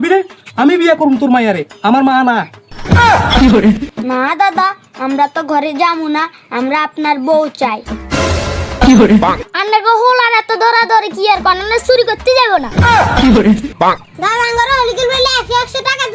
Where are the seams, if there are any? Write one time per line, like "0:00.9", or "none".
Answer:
0:03.9
0:09.4
0:13.7